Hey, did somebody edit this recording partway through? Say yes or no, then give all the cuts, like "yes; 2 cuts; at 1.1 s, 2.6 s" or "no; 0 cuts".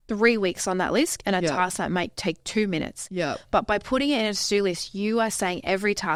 no; 0 cuts